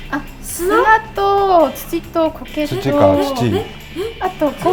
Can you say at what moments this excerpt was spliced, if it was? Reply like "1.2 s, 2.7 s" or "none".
none